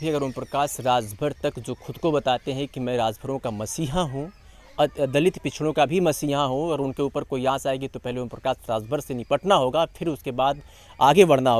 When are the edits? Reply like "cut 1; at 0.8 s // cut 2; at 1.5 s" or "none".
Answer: none